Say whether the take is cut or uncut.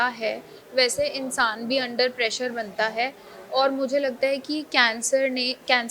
uncut